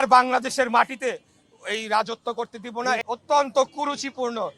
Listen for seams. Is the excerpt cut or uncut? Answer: cut